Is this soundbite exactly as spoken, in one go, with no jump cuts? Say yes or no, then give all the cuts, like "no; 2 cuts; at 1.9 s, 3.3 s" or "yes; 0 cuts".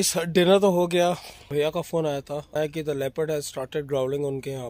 no; 2 cuts; at 1.5 s, 2.5 s